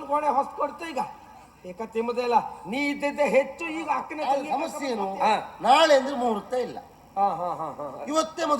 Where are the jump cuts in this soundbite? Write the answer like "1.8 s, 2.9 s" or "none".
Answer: 4.1 s